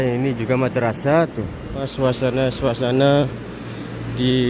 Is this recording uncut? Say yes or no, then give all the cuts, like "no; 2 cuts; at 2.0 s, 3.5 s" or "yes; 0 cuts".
no; 1 cut; at 1.9 s